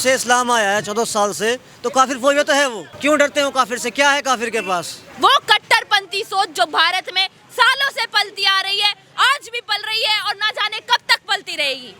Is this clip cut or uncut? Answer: cut